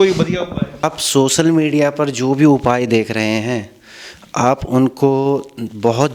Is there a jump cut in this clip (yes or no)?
yes